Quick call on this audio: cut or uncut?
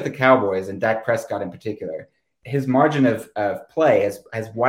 cut